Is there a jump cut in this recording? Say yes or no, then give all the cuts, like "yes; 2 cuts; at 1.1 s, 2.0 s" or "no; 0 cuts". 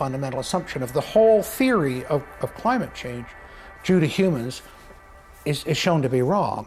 no; 0 cuts